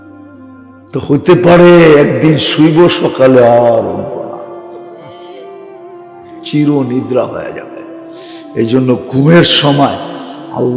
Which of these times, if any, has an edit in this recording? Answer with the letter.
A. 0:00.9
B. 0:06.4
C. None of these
A